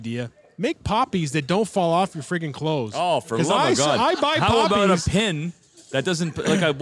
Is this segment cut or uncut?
uncut